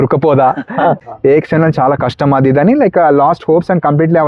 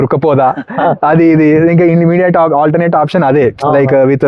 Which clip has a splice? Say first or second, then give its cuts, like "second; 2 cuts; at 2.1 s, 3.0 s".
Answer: first; 1 cut; at 1.0 s